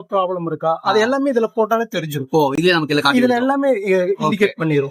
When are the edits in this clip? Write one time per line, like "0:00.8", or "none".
none